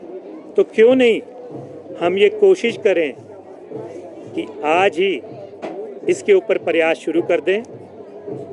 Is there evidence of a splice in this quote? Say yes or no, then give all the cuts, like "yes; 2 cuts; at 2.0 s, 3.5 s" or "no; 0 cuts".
no; 0 cuts